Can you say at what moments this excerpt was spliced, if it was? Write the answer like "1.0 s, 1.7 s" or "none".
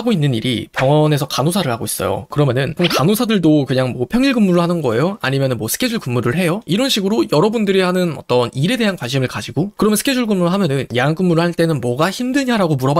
2.3 s